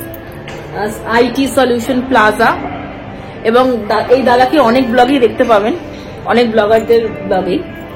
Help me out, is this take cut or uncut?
uncut